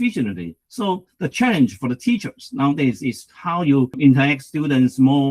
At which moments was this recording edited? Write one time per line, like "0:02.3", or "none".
0:04.0